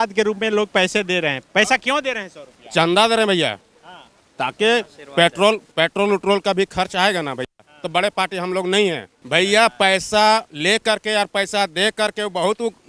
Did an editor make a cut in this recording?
no; 0 cuts

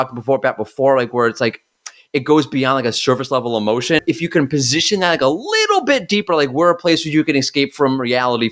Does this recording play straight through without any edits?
no; 1 cut; at 4.0 s

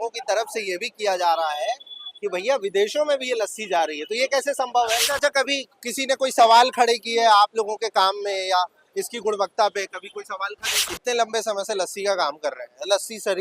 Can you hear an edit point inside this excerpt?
yes; 2 cuts; at 5.1 s, 10.9 s

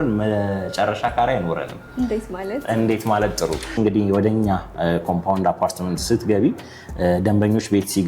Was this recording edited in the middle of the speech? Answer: yes; 1 cut; at 3.7 s

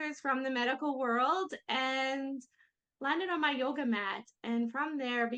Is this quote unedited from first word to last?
yes; 0 cuts

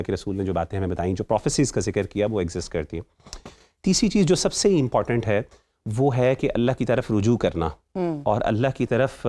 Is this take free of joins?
yes; 0 cuts

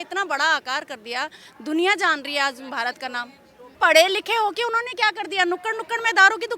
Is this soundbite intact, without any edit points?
no; 1 cut; at 3.8 s

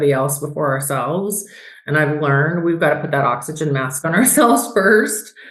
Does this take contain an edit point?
no; 0 cuts

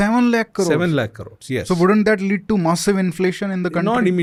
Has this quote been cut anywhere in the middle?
no; 0 cuts

